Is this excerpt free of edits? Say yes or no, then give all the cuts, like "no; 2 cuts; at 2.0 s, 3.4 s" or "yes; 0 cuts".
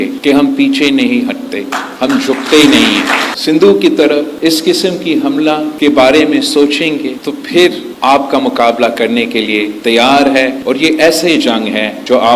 no; 2 cuts; at 3.3 s, 7.9 s